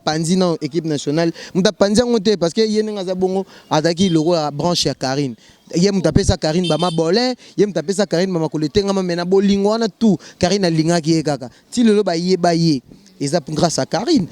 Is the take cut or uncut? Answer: uncut